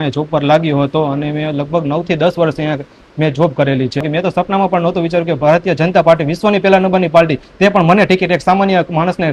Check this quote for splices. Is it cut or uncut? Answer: cut